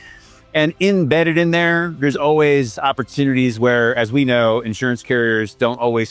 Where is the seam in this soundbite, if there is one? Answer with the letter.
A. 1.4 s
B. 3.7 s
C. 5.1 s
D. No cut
D